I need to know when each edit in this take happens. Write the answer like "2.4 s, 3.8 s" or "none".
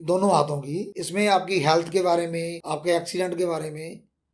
1.0 s, 2.6 s